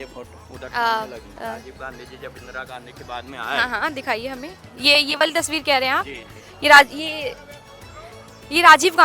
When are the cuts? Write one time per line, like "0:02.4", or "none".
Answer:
0:01.3
0:04.6

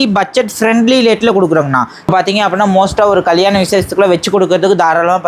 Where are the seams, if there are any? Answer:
0:02.1

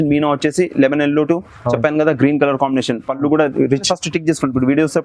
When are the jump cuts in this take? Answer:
0:03.8

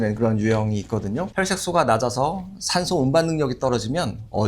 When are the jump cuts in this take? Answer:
0:01.3

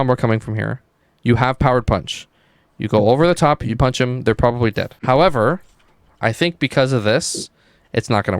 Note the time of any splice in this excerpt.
0:04.9

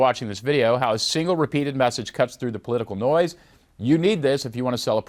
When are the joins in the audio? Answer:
none

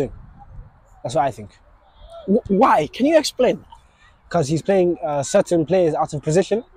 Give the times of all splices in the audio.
none

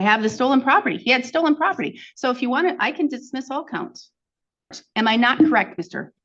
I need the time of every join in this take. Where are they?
0:04.7

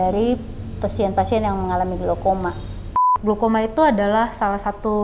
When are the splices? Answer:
0:03.1

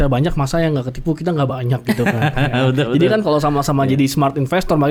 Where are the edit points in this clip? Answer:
none

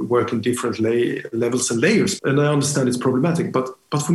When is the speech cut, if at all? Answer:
0:02.1

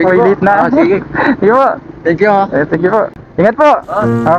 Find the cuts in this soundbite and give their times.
0:03.2

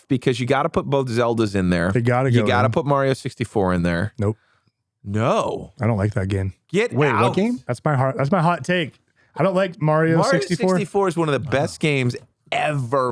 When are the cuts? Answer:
none

